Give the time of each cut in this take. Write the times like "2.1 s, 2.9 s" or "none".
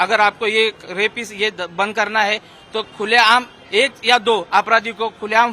none